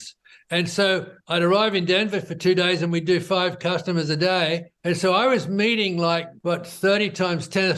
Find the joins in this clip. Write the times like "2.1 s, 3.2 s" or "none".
4.7 s, 6.3 s